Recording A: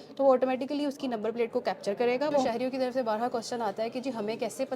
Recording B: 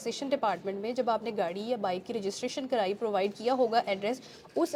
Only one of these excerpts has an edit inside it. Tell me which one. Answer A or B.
A